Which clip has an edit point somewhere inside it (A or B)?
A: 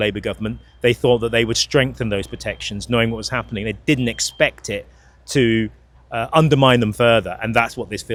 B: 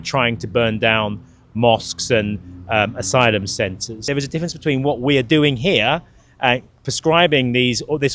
B